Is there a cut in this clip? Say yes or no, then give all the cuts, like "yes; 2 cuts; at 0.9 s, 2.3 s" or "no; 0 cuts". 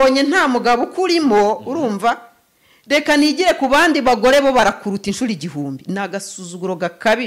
no; 0 cuts